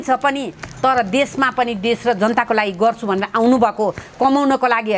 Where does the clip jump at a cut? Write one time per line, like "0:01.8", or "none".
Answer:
none